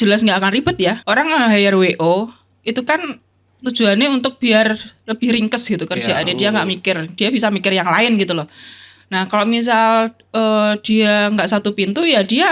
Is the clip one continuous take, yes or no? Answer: no